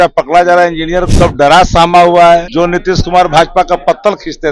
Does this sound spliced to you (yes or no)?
yes